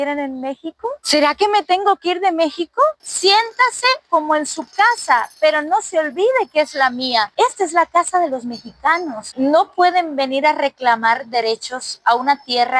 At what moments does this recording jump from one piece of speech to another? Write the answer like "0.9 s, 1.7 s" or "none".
3.0 s, 9.3 s